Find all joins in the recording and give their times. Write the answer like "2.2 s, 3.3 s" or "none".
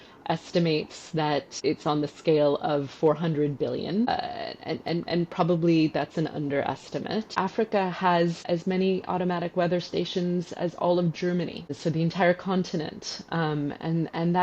1.5 s, 4.1 s, 7.3 s, 8.4 s, 11.8 s